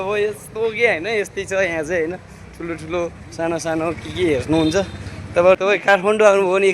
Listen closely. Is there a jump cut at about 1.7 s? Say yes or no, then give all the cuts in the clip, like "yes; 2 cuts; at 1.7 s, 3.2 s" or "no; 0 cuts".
no; 1 cut; at 5.6 s